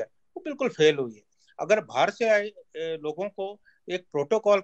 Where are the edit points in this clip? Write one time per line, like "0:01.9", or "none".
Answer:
none